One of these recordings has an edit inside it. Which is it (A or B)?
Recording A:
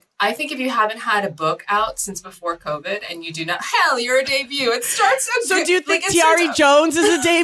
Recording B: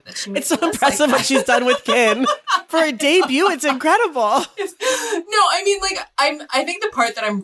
B